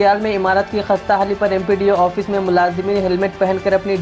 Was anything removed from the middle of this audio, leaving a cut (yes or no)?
no